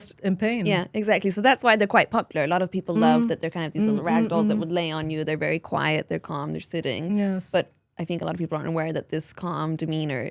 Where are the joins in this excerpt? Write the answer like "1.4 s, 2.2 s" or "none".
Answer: none